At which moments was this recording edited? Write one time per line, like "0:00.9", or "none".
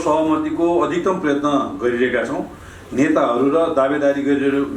none